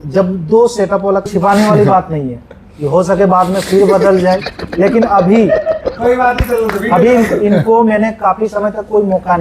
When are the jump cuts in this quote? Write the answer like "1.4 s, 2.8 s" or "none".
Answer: 1.3 s